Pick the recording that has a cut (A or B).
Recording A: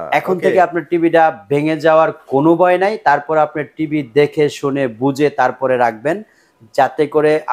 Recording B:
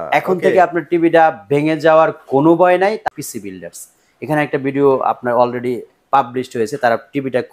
B